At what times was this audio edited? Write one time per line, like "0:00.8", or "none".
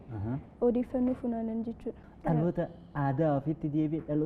0:01.9